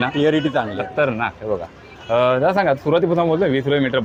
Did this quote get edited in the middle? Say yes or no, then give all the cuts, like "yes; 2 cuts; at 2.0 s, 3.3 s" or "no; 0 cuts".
no; 0 cuts